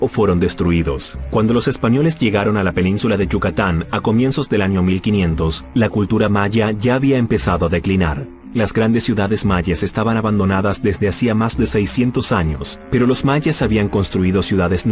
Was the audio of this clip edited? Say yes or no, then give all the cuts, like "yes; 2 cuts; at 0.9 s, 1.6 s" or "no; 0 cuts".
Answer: yes; 1 cut; at 3.4 s